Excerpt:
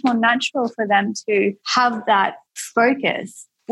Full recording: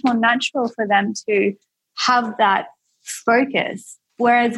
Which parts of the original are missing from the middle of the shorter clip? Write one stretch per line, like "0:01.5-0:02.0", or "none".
0:02.1-0:02.6